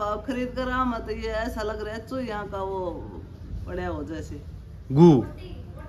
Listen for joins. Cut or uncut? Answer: uncut